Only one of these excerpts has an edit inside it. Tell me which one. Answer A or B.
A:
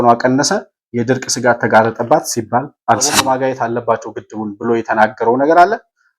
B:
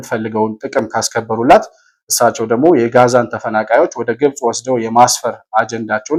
A